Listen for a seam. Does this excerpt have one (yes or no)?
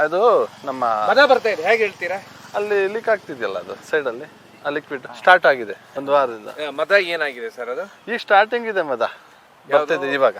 no